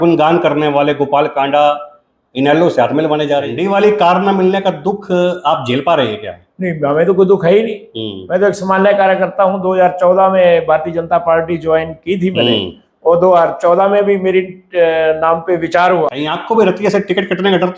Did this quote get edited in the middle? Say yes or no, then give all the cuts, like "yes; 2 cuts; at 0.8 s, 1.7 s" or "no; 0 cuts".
yes; 2 cuts; at 3.6 s, 16.1 s